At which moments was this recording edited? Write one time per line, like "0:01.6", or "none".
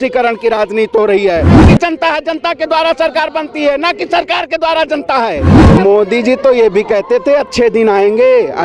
0:01.7
0:05.6